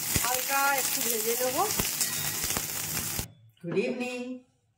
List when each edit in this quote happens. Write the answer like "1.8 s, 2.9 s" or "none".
3.3 s